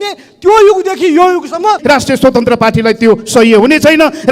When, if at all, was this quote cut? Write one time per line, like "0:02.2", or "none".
0:01.8